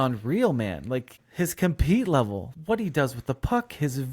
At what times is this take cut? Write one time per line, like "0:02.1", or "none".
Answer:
0:01.2
0:02.5